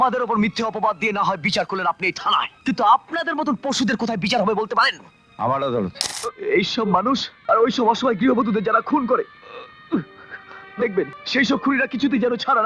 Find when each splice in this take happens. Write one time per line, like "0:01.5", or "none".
0:02.5
0:06.1
0:07.3
0:11.2